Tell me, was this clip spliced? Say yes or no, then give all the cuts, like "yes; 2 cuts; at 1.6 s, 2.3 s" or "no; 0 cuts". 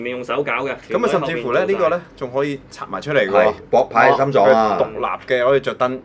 no; 0 cuts